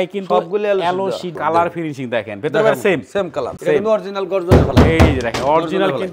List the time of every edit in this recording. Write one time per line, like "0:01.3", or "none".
0:01.3
0:03.5